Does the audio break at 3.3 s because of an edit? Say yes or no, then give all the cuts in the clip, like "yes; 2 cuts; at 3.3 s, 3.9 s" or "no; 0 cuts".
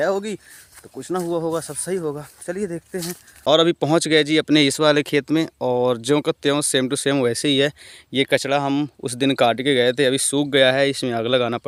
no; 0 cuts